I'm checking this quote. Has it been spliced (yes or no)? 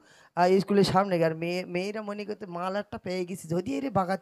no